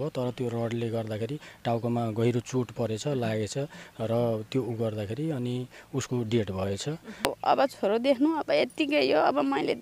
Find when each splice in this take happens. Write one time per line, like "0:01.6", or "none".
0:07.3